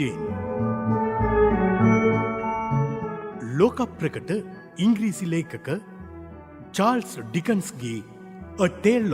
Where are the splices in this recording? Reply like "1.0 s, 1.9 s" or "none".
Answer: 3.2 s